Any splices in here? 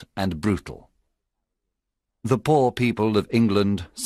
no; 0 cuts

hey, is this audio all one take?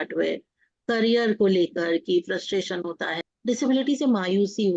no; 1 cut; at 3.2 s

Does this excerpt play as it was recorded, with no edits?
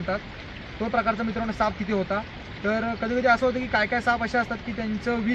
yes; 0 cuts

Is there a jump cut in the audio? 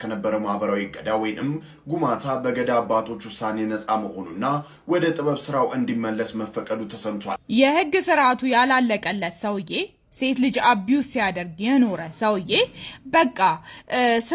yes; 1 cut; at 7.4 s

